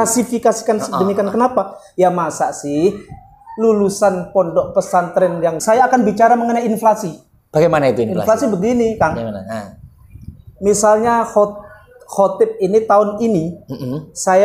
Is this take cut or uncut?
cut